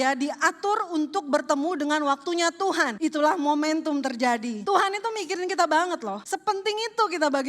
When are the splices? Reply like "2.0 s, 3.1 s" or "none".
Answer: 2.9 s, 4.6 s, 6.2 s